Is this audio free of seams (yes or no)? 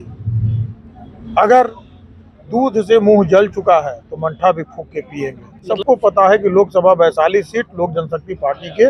no